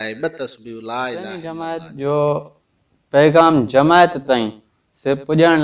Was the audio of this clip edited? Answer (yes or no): yes